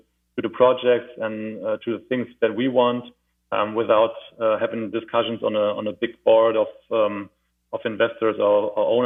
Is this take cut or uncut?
uncut